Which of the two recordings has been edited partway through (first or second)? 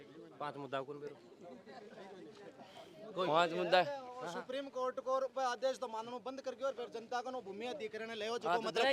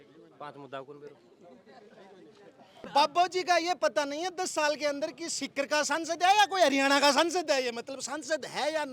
second